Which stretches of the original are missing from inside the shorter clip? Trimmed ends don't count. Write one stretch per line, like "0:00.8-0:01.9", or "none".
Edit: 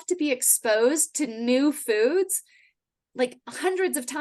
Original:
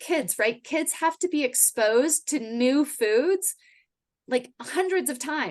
none

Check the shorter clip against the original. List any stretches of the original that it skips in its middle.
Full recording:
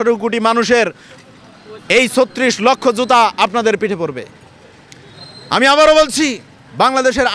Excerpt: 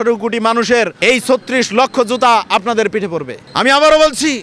0:00.9-0:01.8
0:04.3-0:05.3

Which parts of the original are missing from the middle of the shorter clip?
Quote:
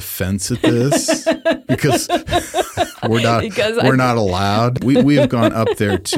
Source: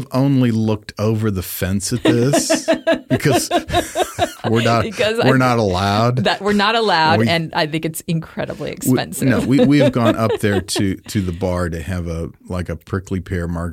0:06.2-0:09.4

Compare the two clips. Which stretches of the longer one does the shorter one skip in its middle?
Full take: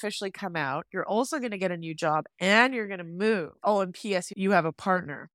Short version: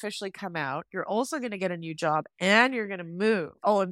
none

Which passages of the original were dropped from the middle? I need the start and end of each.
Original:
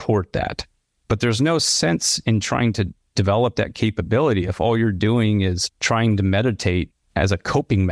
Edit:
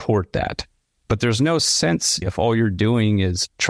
0:02.2-0:04.4

